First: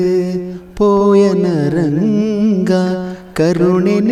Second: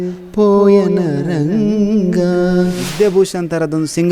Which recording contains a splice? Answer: second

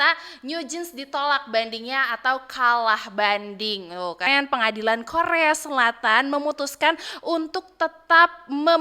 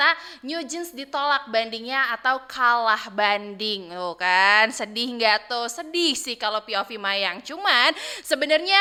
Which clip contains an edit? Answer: first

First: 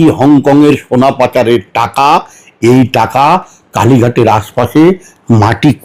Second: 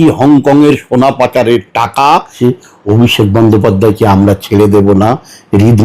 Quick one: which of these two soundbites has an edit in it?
second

